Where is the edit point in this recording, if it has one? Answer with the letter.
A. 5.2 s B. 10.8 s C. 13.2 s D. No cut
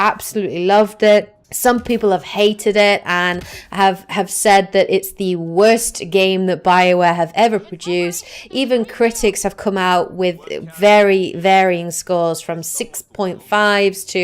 C